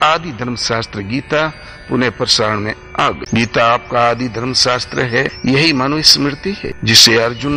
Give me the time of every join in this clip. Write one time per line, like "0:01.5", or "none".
0:03.2
0:05.3
0:06.7